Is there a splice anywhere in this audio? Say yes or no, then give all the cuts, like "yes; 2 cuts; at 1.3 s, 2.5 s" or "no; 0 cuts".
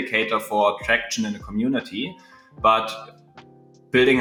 no; 0 cuts